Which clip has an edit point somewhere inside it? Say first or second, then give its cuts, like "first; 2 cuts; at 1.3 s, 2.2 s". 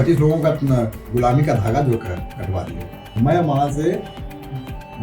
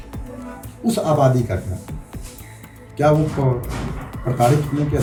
first; 1 cut; at 3.2 s